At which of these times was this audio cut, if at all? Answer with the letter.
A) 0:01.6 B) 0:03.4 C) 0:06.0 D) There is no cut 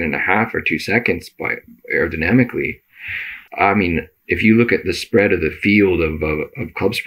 B